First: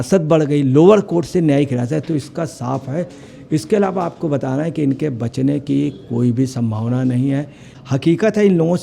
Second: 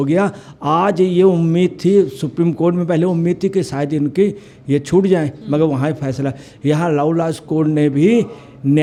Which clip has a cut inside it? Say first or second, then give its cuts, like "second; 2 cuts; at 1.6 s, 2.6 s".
first; 1 cut; at 7.7 s